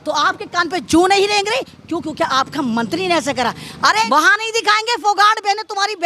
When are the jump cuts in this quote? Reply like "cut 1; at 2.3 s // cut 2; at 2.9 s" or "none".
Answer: cut 1; at 4.1 s